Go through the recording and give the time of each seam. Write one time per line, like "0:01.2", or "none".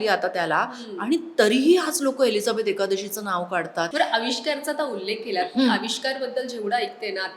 0:03.9